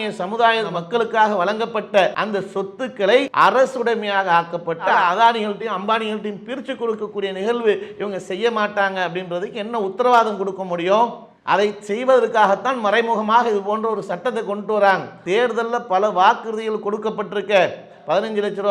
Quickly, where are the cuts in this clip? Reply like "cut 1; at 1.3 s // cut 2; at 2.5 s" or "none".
cut 1; at 2.2 s // cut 2; at 3.3 s // cut 3; at 15.2 s